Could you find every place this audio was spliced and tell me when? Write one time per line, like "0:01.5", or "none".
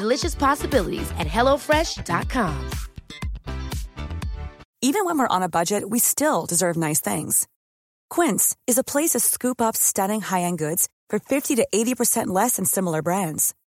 0:04.6